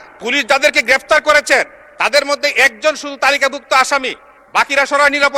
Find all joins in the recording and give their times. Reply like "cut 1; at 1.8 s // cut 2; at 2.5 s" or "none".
none

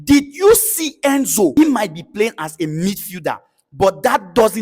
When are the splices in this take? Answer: cut 1; at 1.5 s

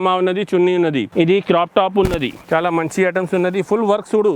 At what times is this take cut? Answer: cut 1; at 1.1 s // cut 2; at 2.4 s

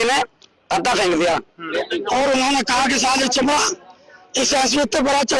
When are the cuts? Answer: cut 1; at 1.6 s

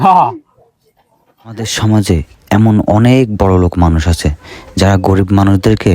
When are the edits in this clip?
cut 1; at 1.7 s

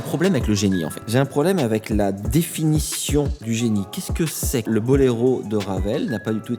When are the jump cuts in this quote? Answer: cut 1; at 1.0 s // cut 2; at 3.4 s // cut 3; at 4.6 s

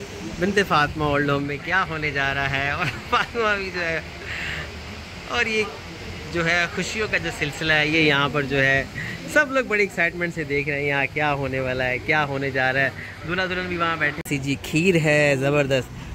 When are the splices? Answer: cut 1; at 14.2 s

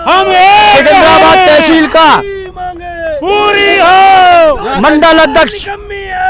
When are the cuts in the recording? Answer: none

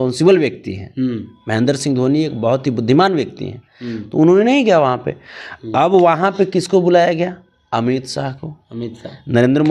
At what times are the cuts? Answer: none

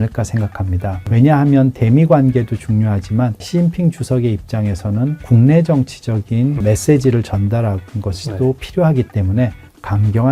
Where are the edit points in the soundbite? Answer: cut 1; at 1.0 s // cut 2; at 3.4 s // cut 3; at 5.3 s // cut 4; at 6.6 s

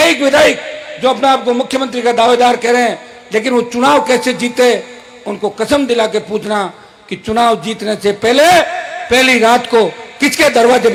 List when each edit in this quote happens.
none

